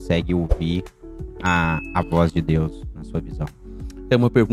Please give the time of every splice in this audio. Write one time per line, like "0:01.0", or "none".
none